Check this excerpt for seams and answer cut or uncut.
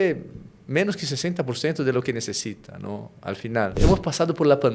cut